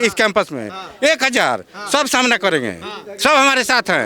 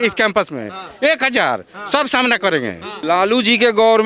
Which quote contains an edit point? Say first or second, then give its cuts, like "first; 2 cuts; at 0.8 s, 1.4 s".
second; 1 cut; at 3.0 s